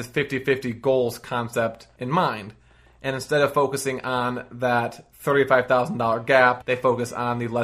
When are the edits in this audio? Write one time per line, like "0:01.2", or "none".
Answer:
0:01.9
0:06.6